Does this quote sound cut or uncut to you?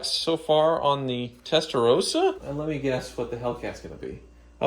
cut